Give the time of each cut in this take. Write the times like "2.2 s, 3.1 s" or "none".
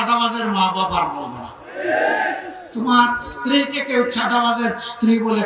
none